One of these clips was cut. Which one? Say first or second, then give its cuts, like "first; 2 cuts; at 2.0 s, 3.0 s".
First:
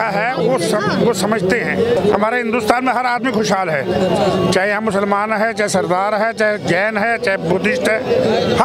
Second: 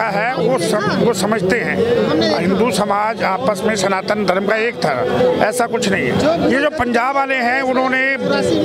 first; 1 cut; at 2.0 s